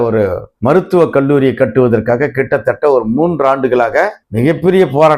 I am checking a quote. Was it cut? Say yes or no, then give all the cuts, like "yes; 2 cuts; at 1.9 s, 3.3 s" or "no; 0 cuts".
no; 0 cuts